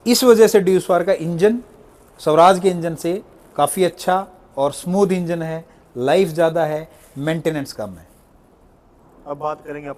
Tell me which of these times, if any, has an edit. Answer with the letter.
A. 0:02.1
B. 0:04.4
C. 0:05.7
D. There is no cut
D